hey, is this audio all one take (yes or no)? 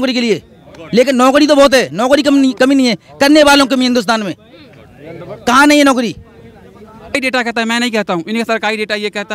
no